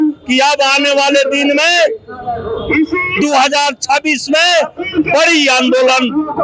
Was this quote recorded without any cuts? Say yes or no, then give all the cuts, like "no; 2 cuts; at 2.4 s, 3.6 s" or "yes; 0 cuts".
yes; 0 cuts